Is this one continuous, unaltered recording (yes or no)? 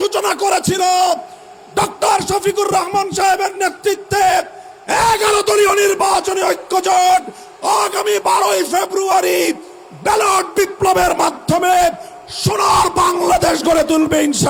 yes